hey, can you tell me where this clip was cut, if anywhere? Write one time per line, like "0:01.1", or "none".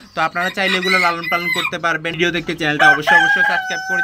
0:02.2